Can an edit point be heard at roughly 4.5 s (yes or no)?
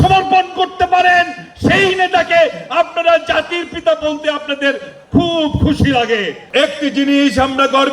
no